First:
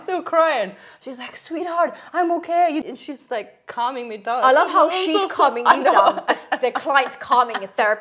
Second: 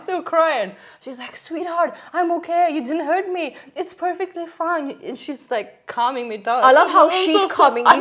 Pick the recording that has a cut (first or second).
first